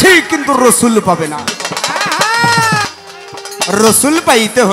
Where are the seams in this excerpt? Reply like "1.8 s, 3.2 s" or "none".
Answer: 2.9 s